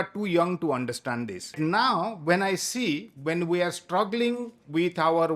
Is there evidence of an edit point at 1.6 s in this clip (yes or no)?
yes